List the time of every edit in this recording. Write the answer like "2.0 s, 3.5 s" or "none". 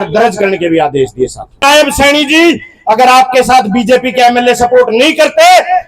1.6 s